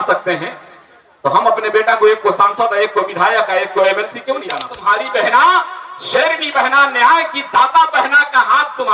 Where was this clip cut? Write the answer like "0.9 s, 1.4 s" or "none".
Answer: 4.5 s